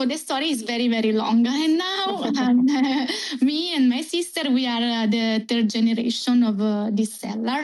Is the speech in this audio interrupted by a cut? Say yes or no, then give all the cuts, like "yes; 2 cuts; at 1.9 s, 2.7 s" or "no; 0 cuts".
no; 0 cuts